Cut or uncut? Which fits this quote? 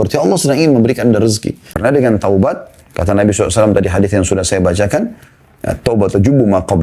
cut